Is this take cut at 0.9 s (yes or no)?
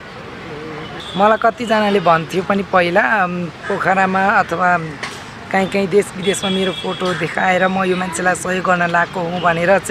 yes